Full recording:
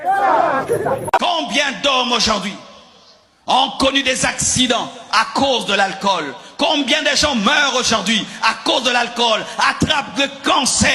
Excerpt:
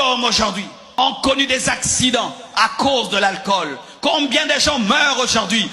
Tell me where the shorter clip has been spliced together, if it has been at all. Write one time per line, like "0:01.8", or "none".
0:01.0